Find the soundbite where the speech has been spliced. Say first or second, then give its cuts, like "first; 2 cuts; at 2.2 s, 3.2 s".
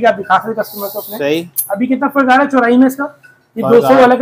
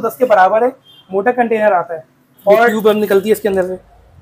second; 1 cut; at 2.7 s